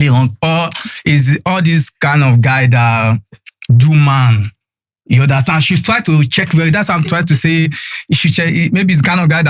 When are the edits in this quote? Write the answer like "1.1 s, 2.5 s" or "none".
none